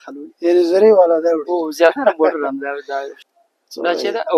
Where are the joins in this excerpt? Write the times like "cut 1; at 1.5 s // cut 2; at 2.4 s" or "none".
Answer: cut 1; at 3.1 s